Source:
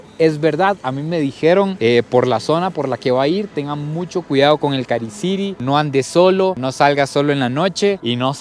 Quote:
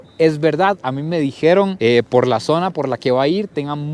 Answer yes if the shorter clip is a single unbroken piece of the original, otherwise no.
yes